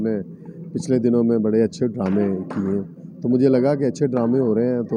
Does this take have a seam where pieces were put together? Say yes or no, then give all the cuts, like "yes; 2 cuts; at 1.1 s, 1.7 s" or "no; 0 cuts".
no; 0 cuts